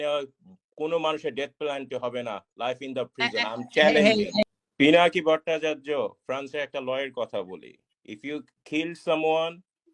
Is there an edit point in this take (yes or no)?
yes